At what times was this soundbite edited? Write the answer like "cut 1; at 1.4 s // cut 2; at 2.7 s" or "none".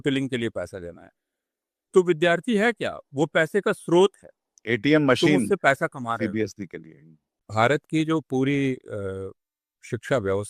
cut 1; at 7.4 s